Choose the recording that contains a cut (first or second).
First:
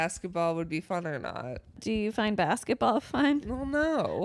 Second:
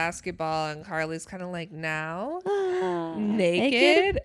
first